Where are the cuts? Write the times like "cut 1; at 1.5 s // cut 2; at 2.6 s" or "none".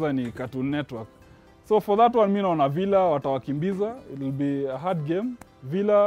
none